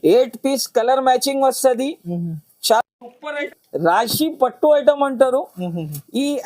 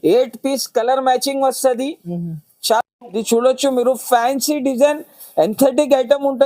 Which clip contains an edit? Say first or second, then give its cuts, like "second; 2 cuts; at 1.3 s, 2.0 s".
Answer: first; 1 cut; at 3.2 s